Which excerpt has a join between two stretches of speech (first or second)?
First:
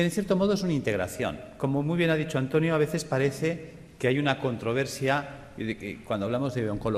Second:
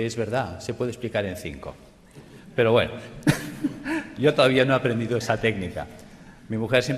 second